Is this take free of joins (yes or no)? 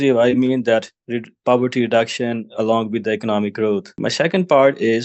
no